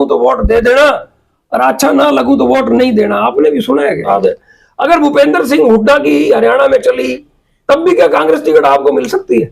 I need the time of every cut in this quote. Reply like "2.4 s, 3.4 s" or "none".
4.1 s